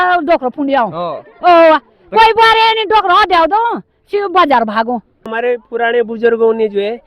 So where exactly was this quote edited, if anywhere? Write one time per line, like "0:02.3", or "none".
0:05.3

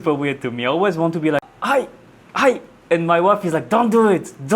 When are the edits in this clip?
0:01.5

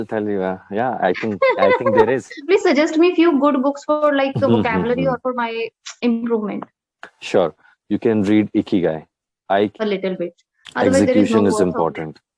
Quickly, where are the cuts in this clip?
0:02.4
0:09.7

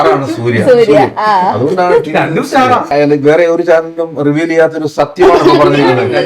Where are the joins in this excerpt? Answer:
0:02.9

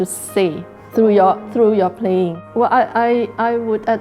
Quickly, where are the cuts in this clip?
0:02.4

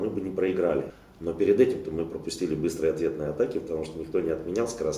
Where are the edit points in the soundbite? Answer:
0:01.0

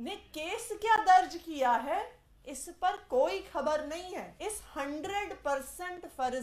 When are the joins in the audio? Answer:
0:04.3

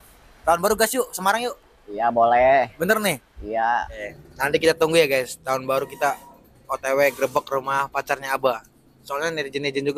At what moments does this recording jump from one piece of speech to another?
0:04.2

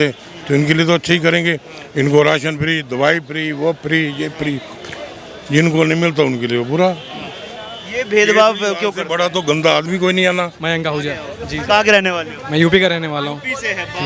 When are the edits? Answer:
0:10.6

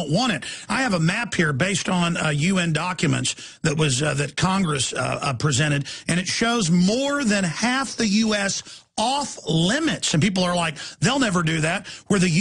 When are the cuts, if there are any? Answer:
0:05.1

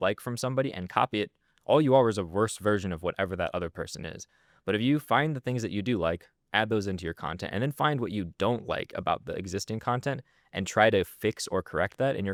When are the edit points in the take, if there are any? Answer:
none

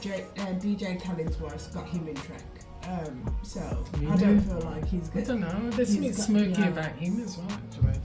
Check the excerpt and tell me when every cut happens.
none

